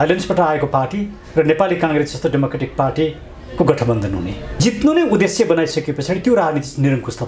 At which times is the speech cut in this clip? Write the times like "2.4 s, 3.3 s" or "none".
4.5 s

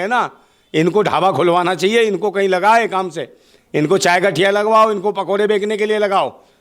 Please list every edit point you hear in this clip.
none

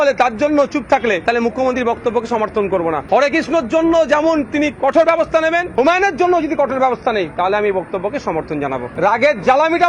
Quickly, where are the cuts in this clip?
1.2 s, 3.0 s, 5.7 s, 8.9 s

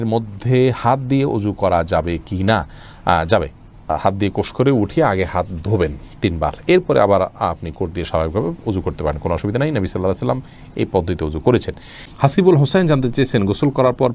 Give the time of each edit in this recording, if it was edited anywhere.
none

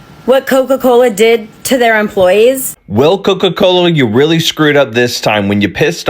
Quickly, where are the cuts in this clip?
2.7 s

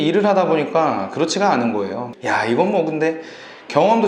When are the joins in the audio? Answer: 2.1 s

